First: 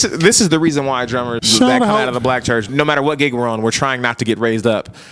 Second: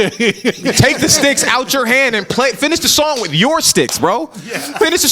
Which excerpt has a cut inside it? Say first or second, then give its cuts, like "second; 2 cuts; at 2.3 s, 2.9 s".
first; 2 cuts; at 1.4 s, 2.7 s